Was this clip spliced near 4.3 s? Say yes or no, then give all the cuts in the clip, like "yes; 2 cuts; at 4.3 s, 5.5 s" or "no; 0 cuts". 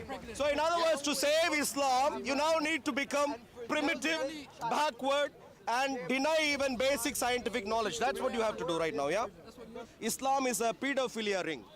no; 1 cut; at 9.9 s